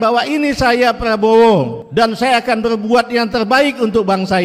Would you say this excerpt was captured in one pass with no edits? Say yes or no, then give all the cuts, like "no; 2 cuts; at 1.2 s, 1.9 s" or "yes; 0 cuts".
no; 1 cut; at 1.8 s